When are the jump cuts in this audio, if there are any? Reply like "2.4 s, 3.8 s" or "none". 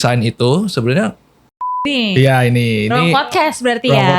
1.8 s